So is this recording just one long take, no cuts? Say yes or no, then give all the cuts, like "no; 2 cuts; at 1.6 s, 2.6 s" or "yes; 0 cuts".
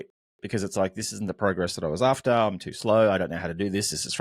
yes; 0 cuts